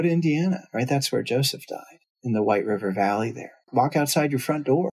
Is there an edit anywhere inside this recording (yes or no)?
yes